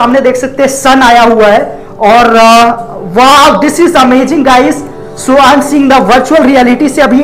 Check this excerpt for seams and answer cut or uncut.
uncut